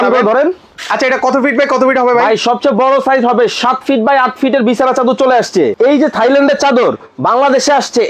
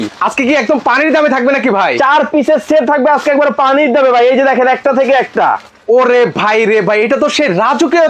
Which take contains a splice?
first; 1 cut; at 5.7 s

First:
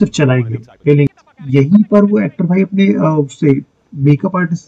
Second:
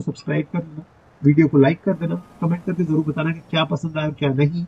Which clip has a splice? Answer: first; 1 cut; at 1.1 s

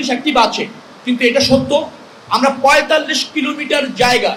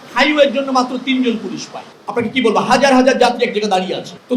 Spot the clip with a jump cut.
second; 1 cut; at 1.9 s

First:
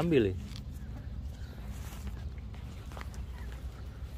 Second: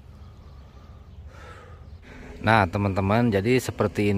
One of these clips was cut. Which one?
second; 1 cut; at 1.9 s

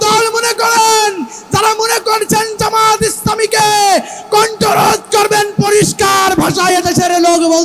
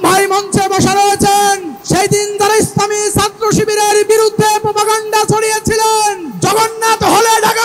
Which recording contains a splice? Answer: second; 2 cuts; at 1.7 s, 6.3 s

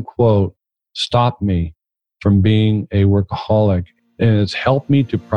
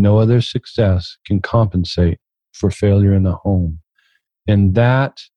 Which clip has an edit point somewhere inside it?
first; 1 cut; at 4.1 s

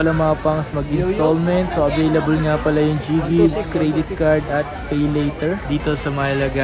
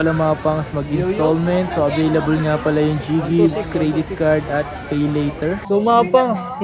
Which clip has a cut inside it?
second; 1 cut; at 5.6 s

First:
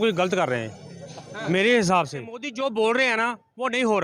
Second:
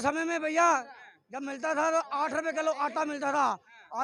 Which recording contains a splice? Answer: first; 1 cut; at 2.5 s

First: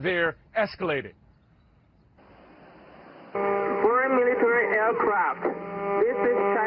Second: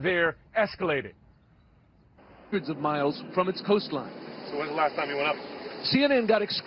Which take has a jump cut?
first; 1 cut; at 2.5 s

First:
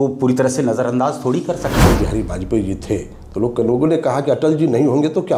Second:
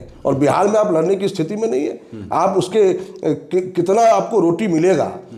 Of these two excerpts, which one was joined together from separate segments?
first; 1 cut; at 1.8 s

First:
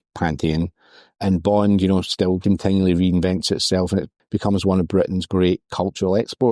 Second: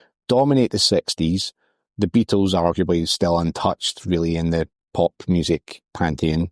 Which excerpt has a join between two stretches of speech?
first; 2 cuts; at 2.4 s, 4.2 s

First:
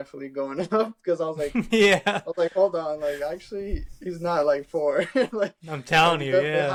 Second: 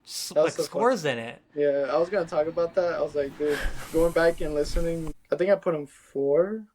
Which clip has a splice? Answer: second; 1 cut; at 5.1 s

